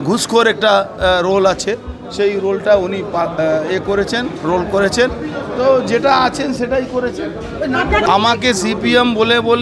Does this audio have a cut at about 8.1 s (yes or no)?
yes